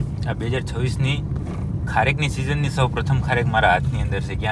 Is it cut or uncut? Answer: uncut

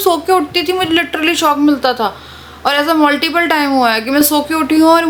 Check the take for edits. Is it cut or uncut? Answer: uncut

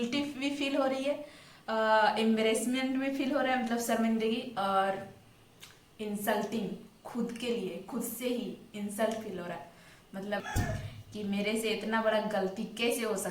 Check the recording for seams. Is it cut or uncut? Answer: cut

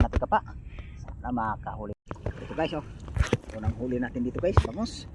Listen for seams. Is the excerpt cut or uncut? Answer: cut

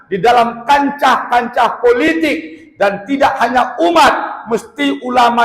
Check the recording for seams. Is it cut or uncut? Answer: uncut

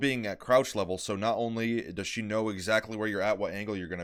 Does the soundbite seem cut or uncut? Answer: uncut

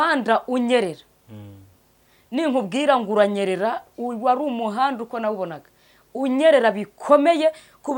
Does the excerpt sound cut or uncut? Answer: uncut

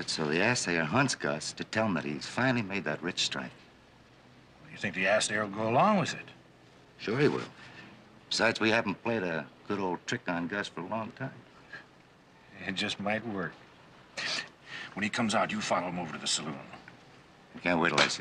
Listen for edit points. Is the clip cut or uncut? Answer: uncut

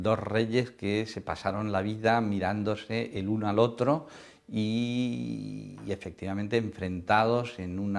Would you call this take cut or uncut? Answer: uncut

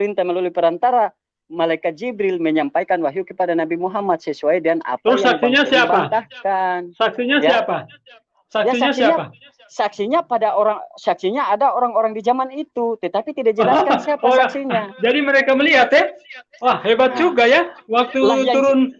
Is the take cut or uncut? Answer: uncut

